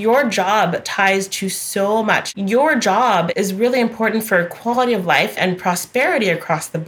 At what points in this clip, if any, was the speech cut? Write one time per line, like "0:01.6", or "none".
0:02.2
0:03.3
0:05.3